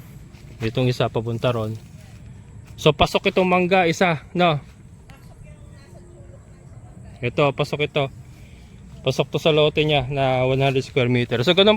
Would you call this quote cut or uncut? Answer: uncut